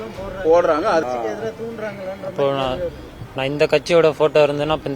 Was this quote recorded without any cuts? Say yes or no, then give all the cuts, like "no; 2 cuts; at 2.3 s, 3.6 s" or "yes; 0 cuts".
no; 1 cut; at 1.0 s